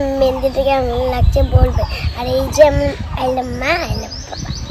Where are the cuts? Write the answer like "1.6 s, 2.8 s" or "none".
none